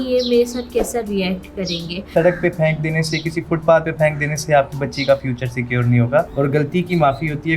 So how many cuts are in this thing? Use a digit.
2